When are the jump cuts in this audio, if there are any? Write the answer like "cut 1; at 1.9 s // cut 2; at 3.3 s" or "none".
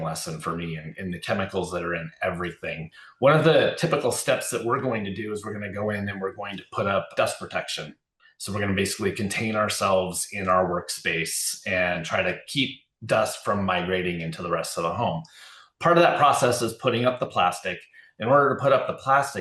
none